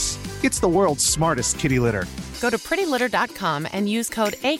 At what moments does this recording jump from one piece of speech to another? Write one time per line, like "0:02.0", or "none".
none